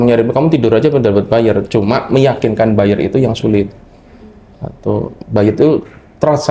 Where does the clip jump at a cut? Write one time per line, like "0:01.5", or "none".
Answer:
none

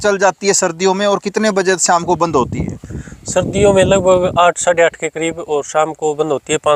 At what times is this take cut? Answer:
none

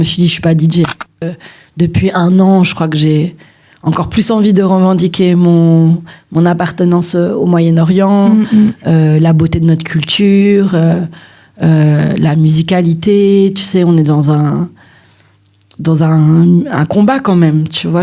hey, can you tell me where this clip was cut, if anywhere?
0:01.3

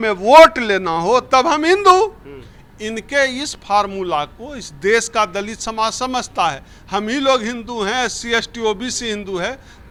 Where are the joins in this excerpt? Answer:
none

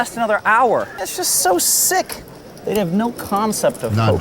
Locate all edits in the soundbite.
0:01.0

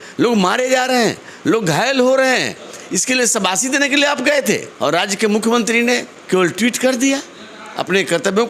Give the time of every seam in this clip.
0:04.7
0:06.1

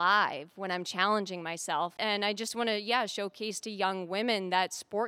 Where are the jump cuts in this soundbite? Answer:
0:02.0

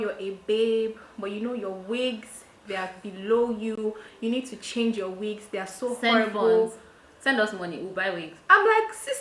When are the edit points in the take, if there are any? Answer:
none

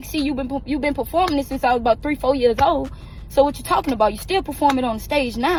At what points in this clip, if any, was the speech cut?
none

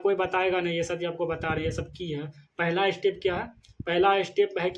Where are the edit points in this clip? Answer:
none

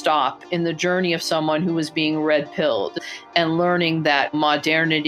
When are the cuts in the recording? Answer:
0:03.0

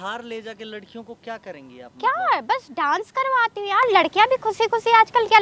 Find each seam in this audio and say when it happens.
none

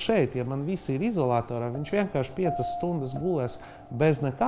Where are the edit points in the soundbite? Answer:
none

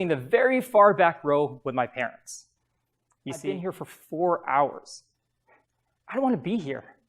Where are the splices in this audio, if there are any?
0:03.4

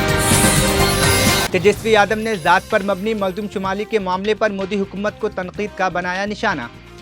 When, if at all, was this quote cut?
0:01.5

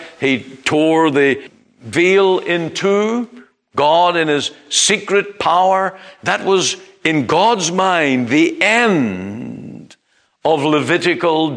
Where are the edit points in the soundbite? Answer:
0:01.5

